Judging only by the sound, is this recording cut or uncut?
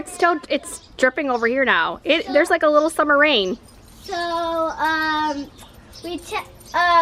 uncut